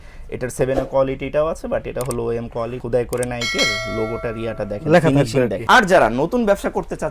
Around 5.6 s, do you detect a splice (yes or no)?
yes